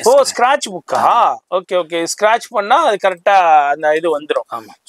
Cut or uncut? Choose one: uncut